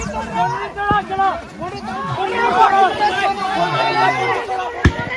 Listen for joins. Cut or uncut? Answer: uncut